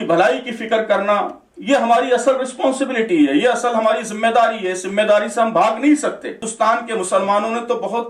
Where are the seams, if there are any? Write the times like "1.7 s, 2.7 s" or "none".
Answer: 6.5 s